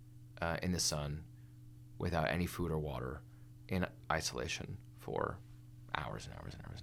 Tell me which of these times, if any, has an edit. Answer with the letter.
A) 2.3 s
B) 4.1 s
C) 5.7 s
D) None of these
D